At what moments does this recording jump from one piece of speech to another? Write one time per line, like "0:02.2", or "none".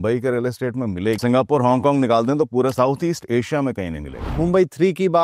0:01.2
0:02.7
0:04.2